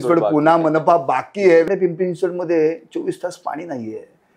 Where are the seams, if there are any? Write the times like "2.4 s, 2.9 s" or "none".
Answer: 1.7 s

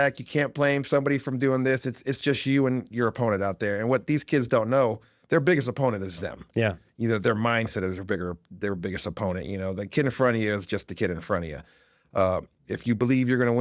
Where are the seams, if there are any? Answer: none

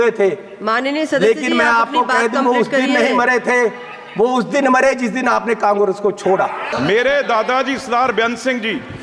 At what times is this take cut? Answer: 6.7 s

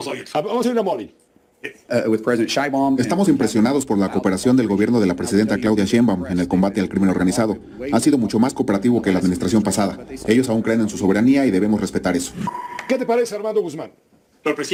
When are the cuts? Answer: none

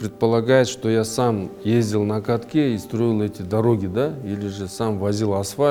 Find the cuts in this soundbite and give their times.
none

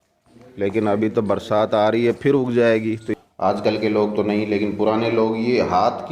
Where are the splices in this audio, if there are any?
3.1 s

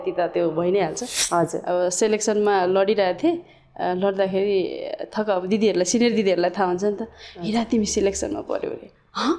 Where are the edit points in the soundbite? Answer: 1.2 s

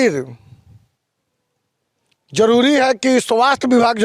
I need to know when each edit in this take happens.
none

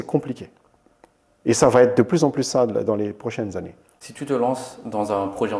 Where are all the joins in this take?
none

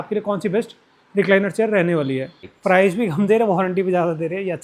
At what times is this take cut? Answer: 2.5 s

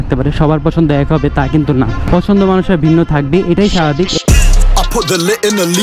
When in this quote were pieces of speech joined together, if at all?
2.0 s, 4.2 s

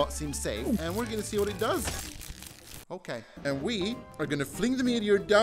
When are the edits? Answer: 3.3 s

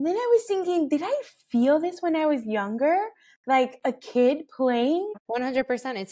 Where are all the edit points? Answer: 5.2 s

